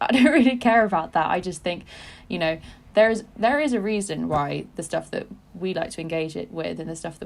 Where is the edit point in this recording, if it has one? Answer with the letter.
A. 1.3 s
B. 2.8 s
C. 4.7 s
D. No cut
D